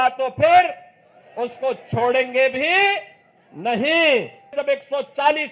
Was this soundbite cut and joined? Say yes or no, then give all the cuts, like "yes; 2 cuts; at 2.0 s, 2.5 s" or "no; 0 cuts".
yes; 1 cut; at 4.6 s